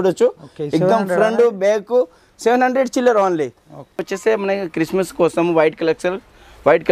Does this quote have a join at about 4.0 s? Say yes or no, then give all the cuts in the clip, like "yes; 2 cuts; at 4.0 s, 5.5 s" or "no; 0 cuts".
yes; 1 cut; at 4.0 s